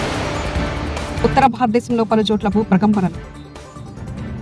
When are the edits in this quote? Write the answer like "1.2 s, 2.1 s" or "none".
1.0 s